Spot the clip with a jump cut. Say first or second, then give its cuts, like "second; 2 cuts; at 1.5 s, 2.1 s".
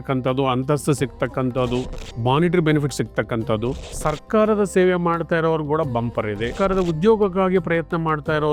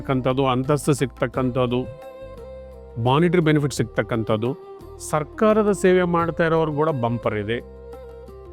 first; 3 cuts; at 2.0 s, 3.9 s, 6.5 s